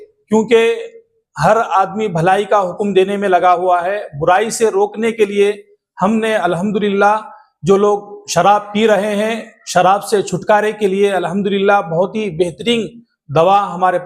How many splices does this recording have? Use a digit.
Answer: 0